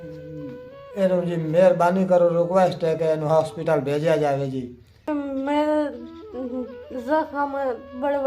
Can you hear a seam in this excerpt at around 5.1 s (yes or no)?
yes